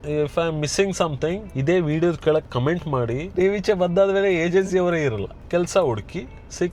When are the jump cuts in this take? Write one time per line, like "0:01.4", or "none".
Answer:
0:03.3
0:05.3